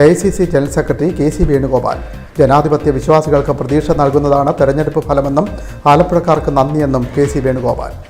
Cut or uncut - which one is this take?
uncut